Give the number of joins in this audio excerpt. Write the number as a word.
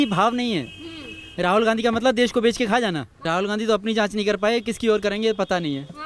one